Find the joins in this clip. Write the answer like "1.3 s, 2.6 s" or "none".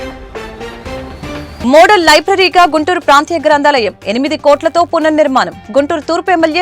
1.6 s